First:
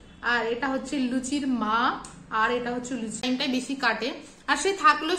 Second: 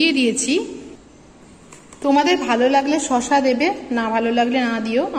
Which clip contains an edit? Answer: first; 1 cut; at 3.2 s

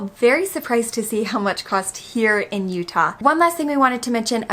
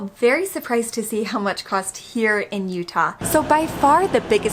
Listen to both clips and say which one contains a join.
second; 1 cut; at 3.1 s

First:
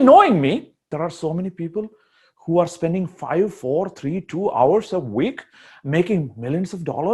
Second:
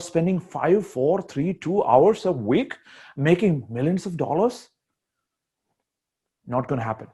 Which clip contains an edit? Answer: first; 1 cut; at 0.9 s

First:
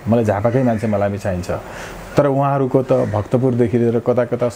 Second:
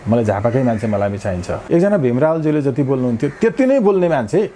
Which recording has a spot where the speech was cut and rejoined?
second; 1 cut; at 1.5 s

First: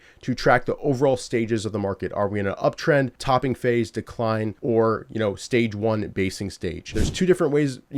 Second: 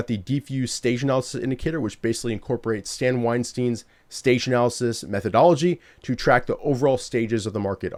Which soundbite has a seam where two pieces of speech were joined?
first; 3 cuts; at 3.2 s, 4.5 s, 7.0 s

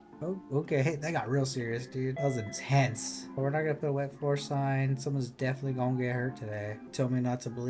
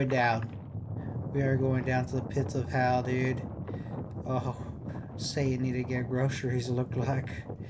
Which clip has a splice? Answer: first; 3 cuts; at 2.2 s, 3.3 s, 6.8 s

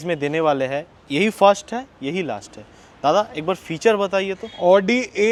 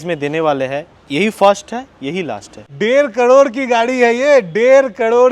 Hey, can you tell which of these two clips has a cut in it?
second; 1 cut; at 2.7 s

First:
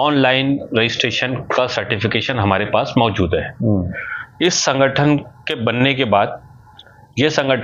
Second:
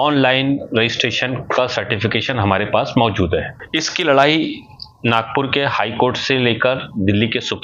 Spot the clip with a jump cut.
second; 1 cut; at 3.5 s

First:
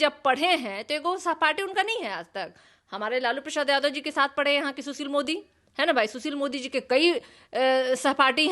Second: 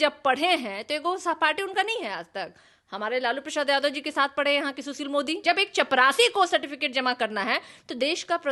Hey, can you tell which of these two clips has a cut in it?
second; 1 cut; at 5.4 s

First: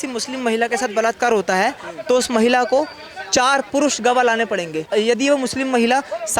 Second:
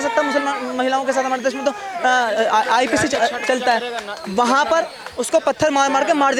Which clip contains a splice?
first; 1 cut; at 4.9 s

